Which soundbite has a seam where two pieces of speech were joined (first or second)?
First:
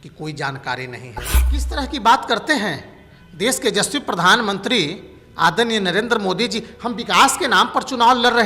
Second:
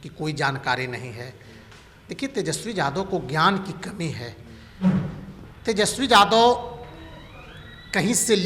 first